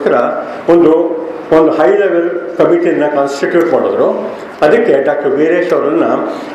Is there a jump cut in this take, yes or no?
no